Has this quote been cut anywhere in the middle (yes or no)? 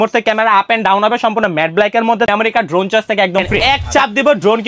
yes